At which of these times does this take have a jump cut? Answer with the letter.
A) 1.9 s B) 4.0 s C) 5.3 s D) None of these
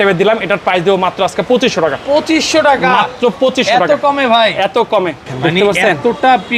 C